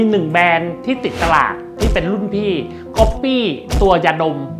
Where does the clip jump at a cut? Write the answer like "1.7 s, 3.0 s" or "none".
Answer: none